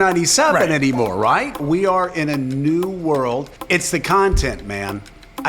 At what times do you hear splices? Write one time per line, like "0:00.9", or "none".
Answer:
0:01.6
0:03.5